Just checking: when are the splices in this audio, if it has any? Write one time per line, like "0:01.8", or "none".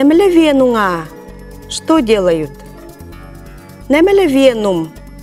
none